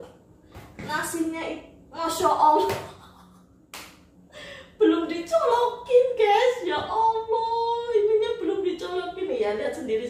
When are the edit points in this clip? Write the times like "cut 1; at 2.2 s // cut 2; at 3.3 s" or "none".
none